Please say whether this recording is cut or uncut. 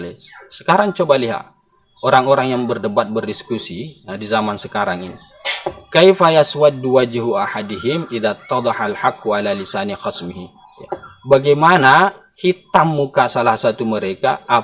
uncut